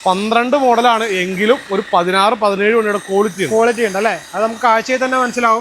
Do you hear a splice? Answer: no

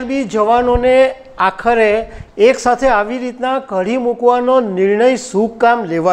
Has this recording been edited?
no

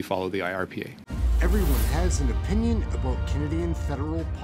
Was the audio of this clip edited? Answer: yes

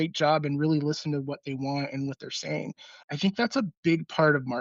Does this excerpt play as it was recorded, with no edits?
no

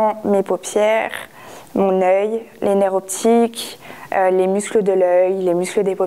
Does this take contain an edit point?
no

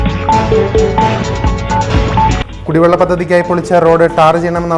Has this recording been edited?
yes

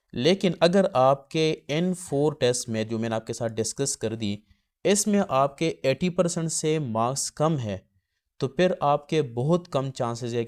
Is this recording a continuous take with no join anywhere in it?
yes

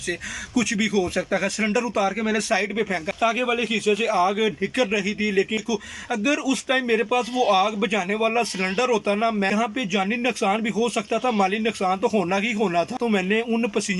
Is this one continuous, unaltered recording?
no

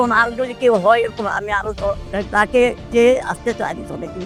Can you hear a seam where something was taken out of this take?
no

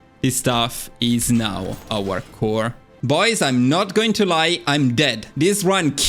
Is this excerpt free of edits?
no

